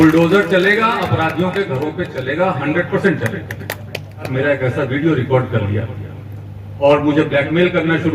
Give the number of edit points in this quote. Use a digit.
1